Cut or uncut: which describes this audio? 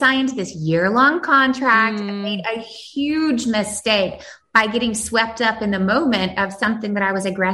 uncut